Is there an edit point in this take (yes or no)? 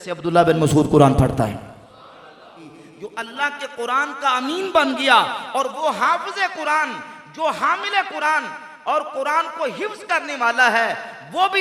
yes